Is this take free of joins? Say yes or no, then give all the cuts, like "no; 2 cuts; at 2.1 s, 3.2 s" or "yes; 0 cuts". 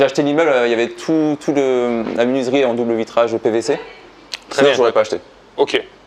yes; 0 cuts